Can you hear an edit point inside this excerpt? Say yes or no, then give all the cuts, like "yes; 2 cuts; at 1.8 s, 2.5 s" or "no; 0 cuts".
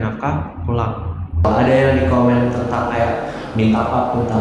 yes; 1 cut; at 1.4 s